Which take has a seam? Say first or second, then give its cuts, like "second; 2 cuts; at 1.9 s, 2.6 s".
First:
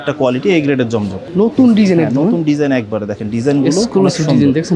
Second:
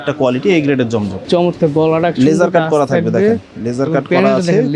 second; 1 cut; at 1.1 s